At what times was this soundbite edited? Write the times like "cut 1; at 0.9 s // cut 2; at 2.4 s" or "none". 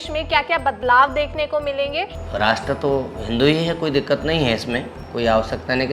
cut 1; at 2.1 s // cut 2; at 5.0 s